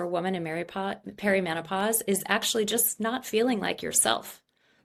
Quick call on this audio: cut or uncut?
uncut